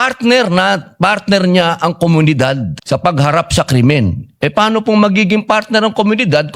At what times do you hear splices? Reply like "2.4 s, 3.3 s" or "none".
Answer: 2.7 s